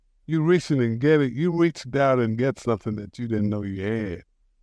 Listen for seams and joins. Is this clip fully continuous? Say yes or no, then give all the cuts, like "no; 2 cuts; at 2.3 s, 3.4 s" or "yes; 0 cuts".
yes; 0 cuts